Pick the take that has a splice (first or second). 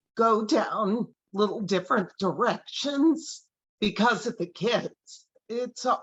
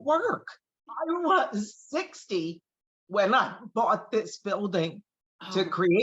second